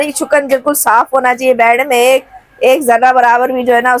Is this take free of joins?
yes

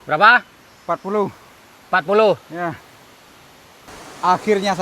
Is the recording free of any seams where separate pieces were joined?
no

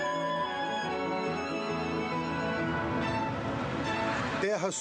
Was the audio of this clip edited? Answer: no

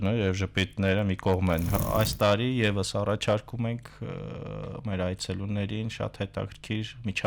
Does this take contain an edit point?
yes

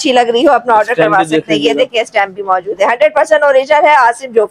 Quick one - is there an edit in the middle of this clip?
no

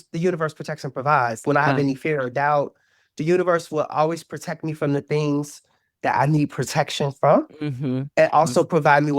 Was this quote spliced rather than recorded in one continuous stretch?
yes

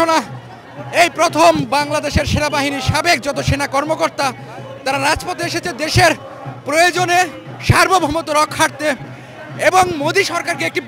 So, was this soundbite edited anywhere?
no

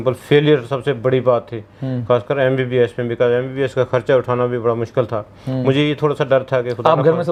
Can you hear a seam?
no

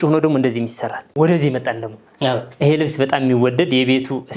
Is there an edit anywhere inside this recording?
yes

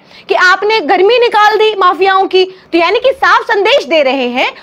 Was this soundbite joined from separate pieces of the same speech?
no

